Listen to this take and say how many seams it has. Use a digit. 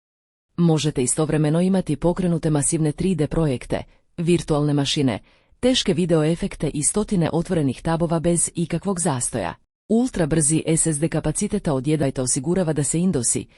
1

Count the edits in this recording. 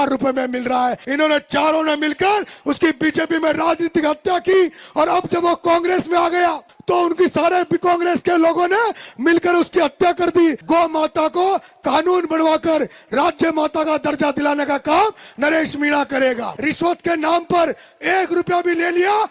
3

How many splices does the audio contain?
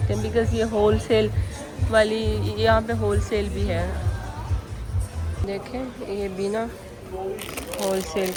0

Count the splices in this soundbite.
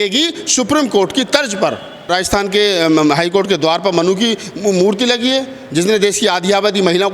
1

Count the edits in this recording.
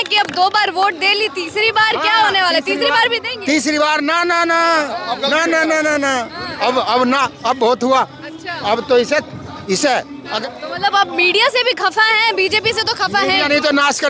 1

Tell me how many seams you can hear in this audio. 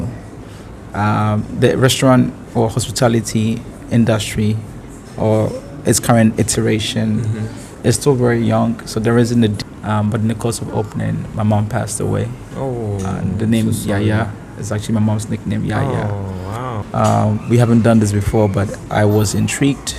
2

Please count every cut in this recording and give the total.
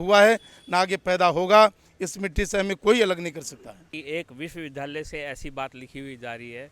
1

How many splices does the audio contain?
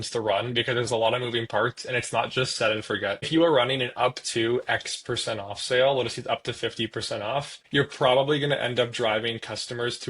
2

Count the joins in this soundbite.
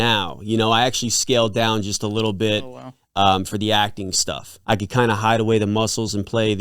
1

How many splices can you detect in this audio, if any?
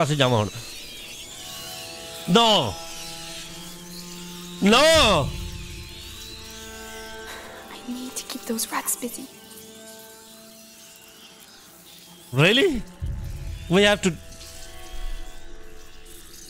0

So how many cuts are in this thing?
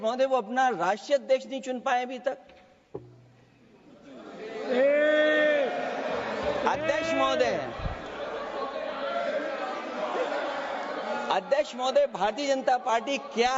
0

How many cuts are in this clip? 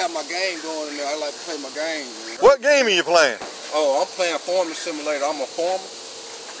1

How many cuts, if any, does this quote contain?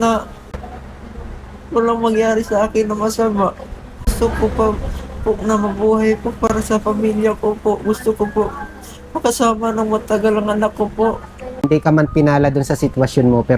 2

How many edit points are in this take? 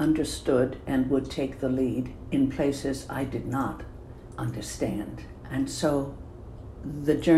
0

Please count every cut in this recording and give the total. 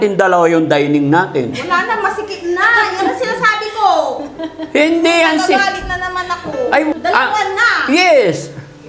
1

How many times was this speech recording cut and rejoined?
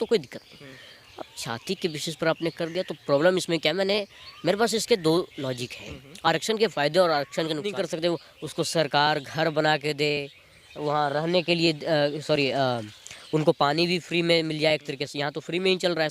1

